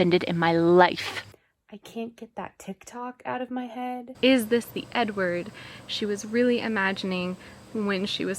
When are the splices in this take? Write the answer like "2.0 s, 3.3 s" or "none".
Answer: 1.4 s, 4.1 s